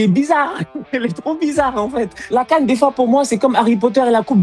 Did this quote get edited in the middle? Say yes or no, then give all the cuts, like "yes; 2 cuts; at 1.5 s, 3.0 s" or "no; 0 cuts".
yes; 1 cut; at 2.2 s